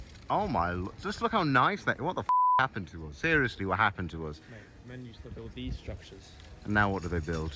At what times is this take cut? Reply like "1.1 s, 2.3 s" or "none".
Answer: none